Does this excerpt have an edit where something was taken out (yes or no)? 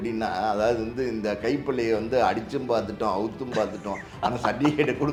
no